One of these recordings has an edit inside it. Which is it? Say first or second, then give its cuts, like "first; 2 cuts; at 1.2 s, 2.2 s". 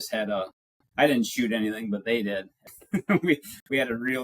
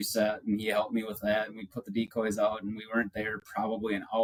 first; 1 cut; at 2.6 s